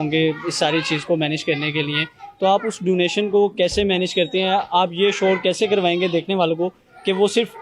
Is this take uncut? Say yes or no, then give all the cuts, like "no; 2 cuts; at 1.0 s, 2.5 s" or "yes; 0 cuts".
yes; 0 cuts